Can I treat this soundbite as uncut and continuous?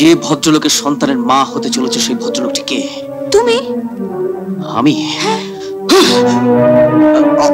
yes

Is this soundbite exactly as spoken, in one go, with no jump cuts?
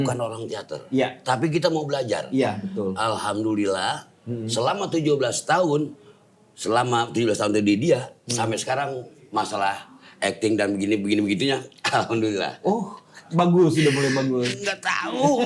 yes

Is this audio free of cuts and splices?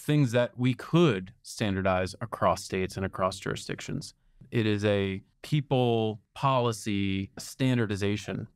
no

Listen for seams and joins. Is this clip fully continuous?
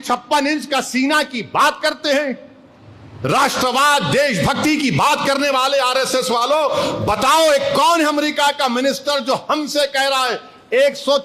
yes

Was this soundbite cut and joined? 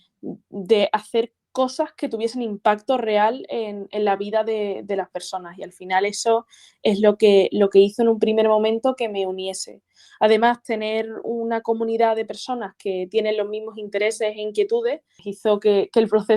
yes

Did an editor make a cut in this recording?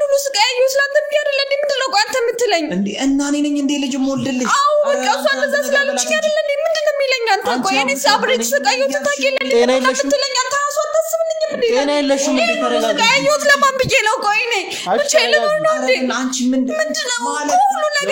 no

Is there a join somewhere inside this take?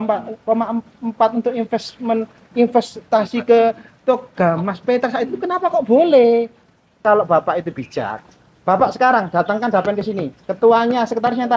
yes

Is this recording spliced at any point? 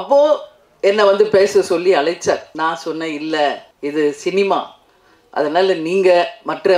yes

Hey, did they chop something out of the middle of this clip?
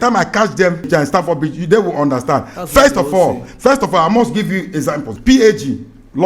yes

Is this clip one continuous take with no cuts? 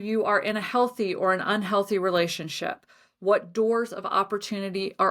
yes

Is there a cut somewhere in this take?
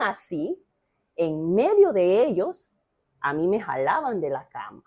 no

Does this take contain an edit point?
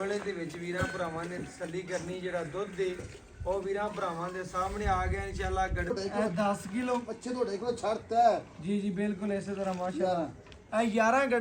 yes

